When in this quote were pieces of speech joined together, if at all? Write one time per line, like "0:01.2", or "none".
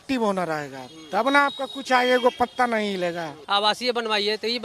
0:03.4